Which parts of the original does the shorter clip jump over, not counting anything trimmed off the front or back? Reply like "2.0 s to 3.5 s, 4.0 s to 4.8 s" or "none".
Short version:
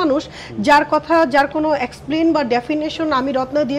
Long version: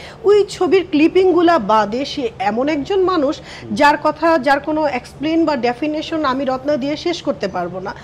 none

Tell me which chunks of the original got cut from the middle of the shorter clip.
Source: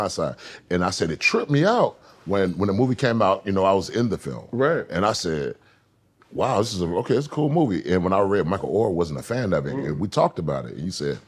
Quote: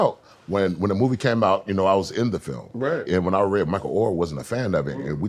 4.8 s to 7.8 s

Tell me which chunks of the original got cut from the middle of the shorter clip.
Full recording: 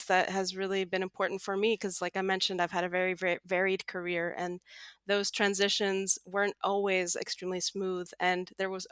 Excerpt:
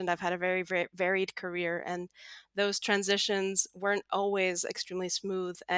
none

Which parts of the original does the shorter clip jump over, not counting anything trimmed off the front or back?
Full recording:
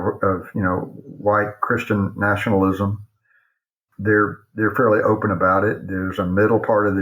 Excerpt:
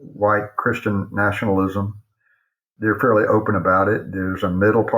3.7 s to 4.4 s

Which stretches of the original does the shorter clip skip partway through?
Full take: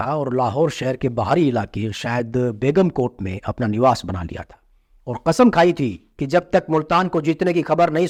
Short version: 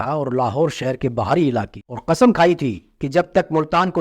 1.8 s to 5.0 s

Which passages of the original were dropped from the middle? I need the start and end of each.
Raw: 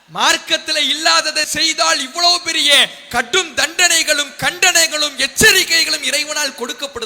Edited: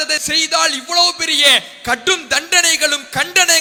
none

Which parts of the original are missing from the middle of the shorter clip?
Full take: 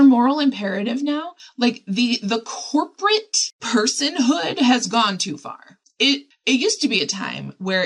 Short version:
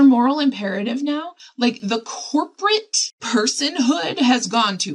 1.8 s to 2.2 s

